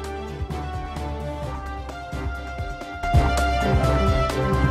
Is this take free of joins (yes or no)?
no